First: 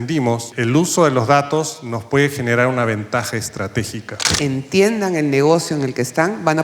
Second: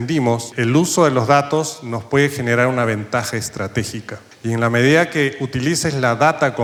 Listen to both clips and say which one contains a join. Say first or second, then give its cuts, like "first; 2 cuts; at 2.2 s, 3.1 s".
first; 1 cut; at 4.3 s